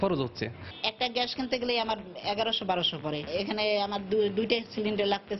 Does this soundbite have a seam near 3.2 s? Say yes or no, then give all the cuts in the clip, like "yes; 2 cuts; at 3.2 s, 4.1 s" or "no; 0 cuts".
yes; 1 cut; at 3.2 s